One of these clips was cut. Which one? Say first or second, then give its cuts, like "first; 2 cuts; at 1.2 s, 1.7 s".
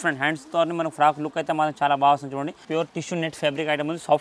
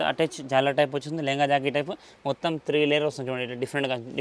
first; 1 cut; at 2.6 s